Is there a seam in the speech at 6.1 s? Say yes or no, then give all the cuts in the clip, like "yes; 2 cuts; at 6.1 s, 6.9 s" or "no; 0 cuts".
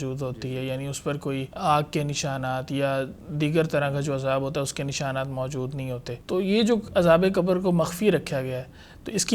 yes; 2 cuts; at 1.5 s, 6.1 s